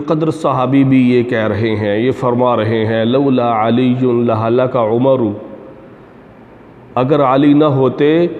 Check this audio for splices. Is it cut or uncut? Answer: uncut